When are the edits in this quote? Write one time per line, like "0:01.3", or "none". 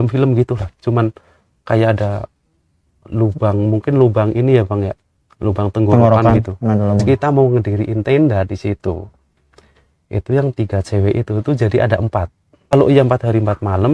0:07.0
0:12.7